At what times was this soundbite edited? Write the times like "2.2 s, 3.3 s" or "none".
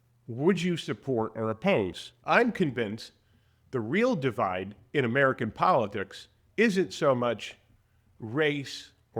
2.1 s